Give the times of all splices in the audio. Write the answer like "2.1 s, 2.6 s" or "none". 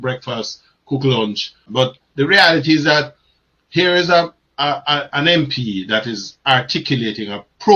1.6 s